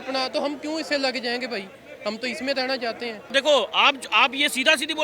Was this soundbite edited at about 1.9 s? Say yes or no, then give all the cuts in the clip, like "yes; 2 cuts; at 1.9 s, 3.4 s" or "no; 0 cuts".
no; 1 cut; at 3.3 s